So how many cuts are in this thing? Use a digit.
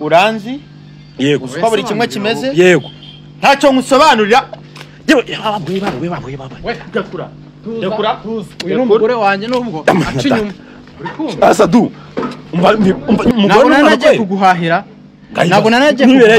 1